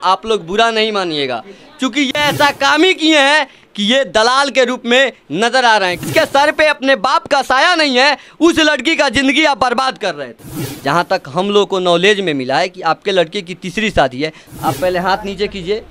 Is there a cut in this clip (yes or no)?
yes